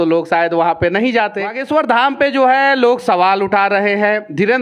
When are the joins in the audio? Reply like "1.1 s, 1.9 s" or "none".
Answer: 1.6 s